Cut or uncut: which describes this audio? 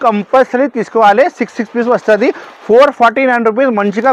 uncut